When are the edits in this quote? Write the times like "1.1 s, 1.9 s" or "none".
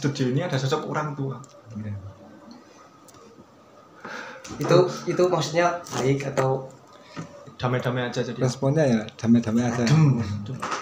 7.5 s